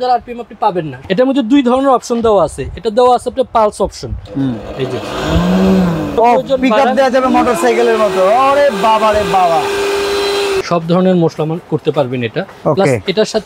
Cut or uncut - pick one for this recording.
cut